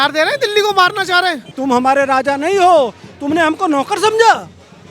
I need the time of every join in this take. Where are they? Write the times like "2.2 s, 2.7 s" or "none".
1.5 s